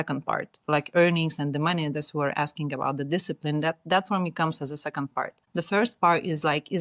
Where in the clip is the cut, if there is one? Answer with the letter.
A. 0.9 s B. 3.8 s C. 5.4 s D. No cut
C